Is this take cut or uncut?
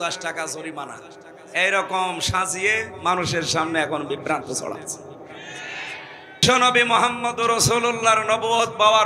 cut